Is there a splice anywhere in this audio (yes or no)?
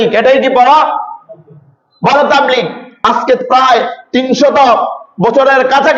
yes